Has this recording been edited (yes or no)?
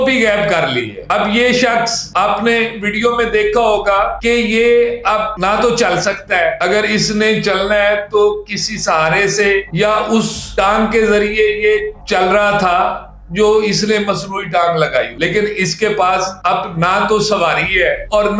no